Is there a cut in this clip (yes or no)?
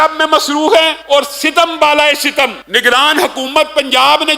yes